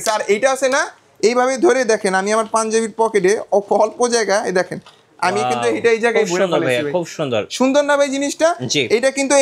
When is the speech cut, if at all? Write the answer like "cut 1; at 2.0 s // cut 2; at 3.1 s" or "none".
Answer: none